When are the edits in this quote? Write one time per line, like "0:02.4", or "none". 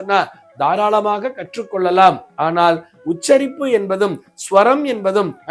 none